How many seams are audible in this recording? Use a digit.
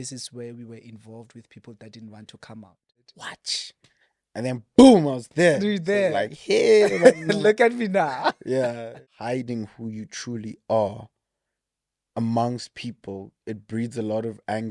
2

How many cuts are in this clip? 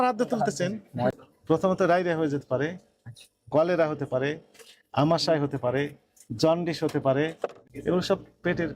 2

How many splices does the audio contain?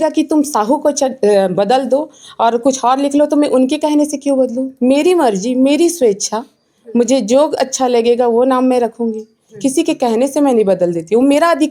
0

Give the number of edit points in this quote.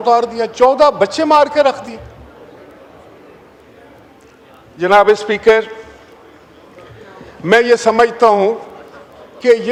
0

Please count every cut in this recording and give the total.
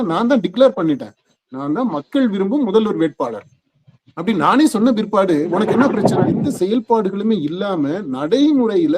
1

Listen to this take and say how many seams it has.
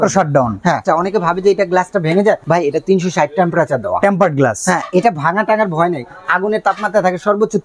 2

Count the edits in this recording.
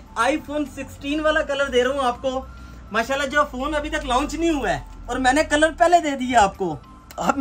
0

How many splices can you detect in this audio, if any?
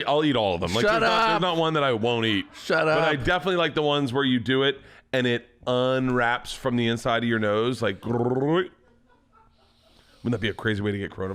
0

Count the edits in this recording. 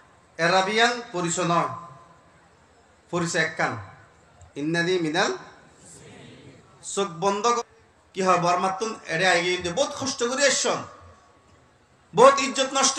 1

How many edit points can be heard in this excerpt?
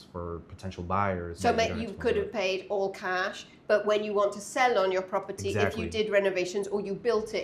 1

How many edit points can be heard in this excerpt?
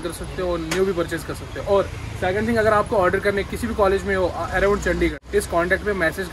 1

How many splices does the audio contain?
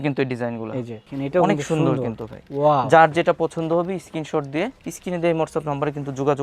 1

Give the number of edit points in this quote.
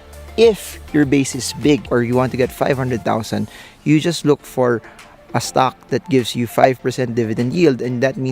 1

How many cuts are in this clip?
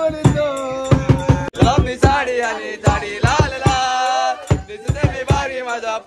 1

